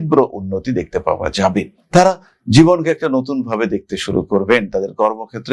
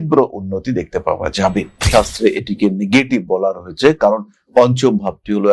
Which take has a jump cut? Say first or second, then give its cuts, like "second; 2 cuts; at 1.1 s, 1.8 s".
second; 1 cut; at 1.8 s